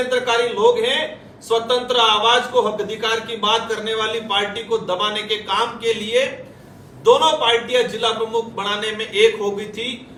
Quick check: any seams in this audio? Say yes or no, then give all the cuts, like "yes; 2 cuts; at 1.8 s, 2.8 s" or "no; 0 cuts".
no; 0 cuts